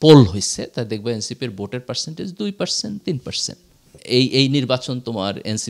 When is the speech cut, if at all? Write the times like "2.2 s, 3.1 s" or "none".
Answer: 4.0 s